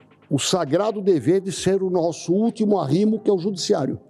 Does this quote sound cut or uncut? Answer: uncut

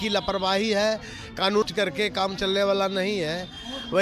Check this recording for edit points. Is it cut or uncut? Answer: cut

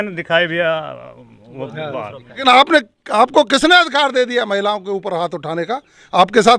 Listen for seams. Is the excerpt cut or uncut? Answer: cut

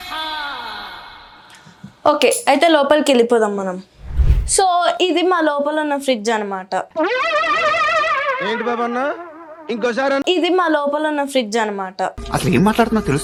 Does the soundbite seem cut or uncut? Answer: uncut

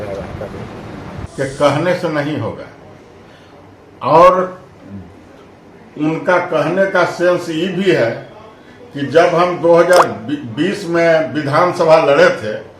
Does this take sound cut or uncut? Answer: cut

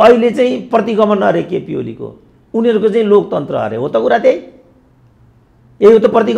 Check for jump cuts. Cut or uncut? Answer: uncut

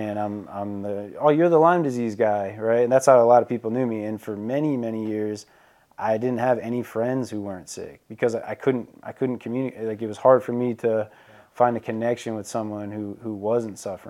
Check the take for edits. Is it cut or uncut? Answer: uncut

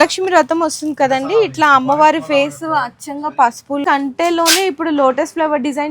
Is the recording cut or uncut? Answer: cut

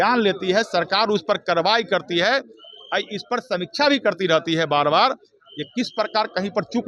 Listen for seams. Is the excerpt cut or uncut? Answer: uncut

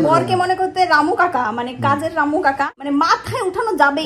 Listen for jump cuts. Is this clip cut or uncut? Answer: cut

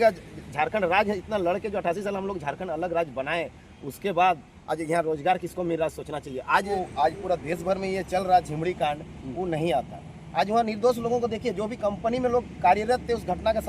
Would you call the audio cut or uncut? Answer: cut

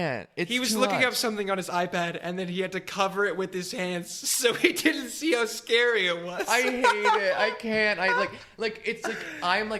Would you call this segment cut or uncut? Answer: uncut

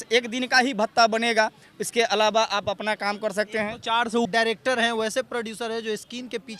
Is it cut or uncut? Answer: cut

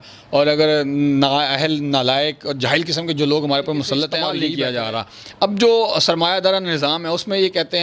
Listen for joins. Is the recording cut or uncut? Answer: cut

